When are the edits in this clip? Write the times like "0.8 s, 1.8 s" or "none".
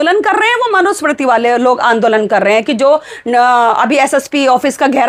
none